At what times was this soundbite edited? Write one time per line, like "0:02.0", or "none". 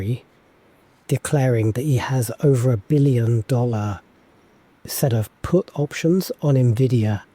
0:01.0